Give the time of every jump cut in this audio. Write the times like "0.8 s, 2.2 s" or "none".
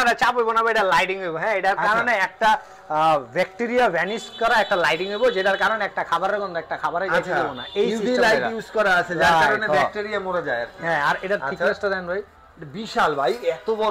none